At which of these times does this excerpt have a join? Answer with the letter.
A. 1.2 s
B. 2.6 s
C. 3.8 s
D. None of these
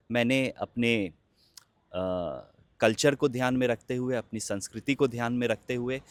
D